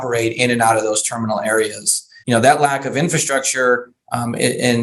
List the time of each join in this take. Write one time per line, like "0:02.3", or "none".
0:02.1